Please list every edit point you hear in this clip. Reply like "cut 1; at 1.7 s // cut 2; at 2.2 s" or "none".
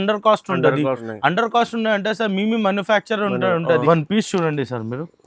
cut 1; at 1.1 s // cut 2; at 3.8 s